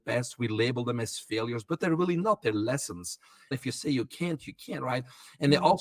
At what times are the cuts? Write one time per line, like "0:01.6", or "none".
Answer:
0:03.5